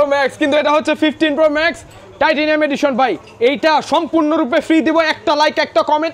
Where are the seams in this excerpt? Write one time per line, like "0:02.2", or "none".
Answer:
none

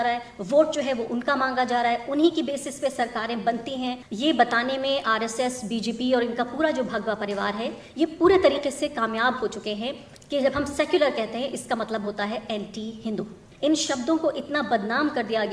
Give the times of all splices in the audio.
0:04.1
0:13.4

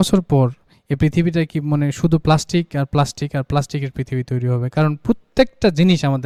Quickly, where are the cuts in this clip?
none

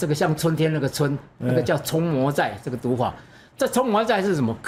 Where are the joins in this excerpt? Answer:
none

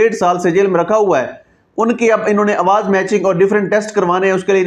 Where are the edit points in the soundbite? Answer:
none

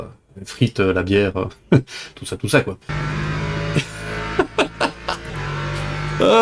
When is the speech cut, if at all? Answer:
0:02.9

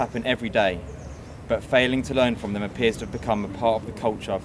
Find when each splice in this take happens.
none

